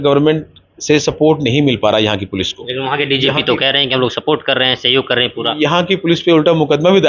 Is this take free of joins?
yes; 0 cuts

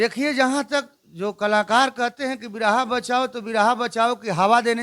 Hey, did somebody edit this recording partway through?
no; 0 cuts

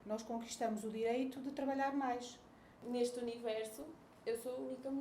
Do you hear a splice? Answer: yes; 1 cut; at 2.8 s

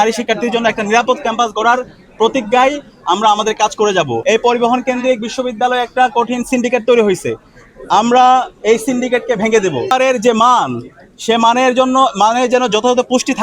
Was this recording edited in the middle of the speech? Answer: yes; 2 cuts; at 4.2 s, 9.9 s

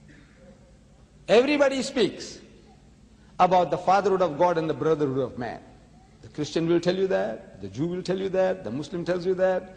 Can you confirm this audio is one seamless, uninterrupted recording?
no; 1 cut; at 8.6 s

